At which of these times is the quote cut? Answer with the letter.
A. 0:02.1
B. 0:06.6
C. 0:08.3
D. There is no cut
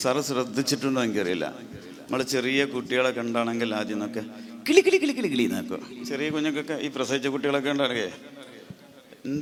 D